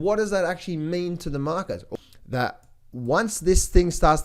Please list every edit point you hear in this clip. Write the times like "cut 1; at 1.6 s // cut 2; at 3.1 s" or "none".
cut 1; at 1.9 s